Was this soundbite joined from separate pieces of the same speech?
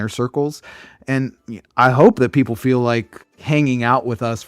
yes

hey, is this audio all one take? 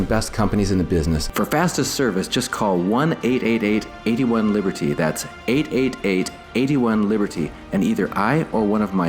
no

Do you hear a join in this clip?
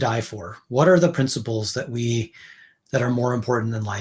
no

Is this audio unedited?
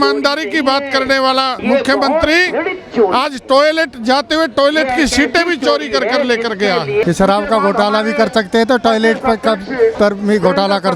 no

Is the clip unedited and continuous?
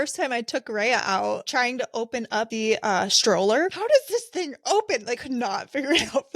no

